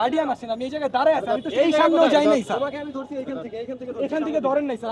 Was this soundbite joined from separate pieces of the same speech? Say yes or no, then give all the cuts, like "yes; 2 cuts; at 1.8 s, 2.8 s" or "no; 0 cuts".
no; 0 cuts